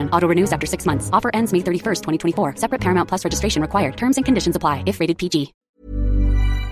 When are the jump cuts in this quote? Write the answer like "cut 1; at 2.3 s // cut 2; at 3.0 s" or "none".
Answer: cut 1; at 5.6 s